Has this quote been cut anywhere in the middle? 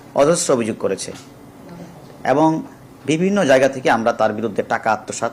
no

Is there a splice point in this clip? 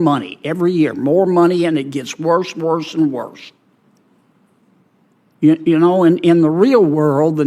no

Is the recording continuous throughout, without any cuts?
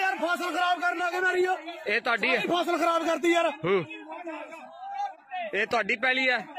no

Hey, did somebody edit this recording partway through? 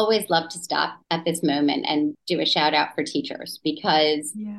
yes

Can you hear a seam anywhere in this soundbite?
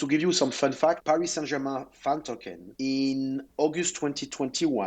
yes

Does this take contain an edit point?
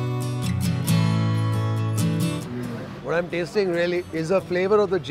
no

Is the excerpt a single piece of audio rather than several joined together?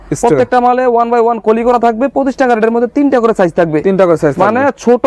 yes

